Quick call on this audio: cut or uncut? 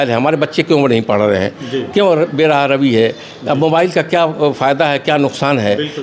uncut